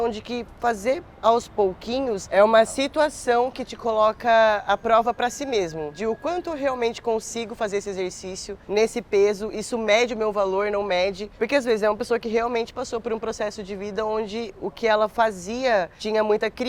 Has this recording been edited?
no; 0 cuts

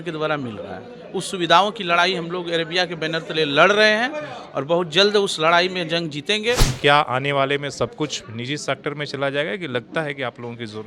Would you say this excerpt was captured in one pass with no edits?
no; 1 cut; at 6.7 s

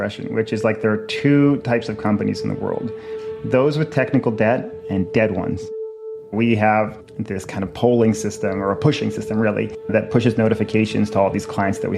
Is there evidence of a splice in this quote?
yes; 1 cut; at 5.7 s

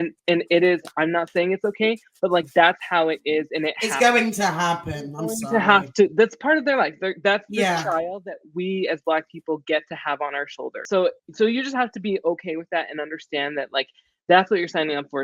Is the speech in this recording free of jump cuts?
no; 1 cut; at 10.8 s

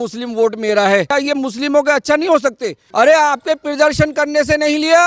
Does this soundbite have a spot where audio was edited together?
yes; 2 cuts; at 1.1 s, 2.8 s

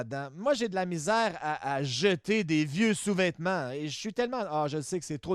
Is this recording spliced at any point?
no; 0 cuts

